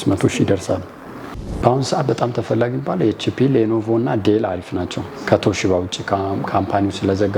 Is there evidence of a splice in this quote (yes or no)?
yes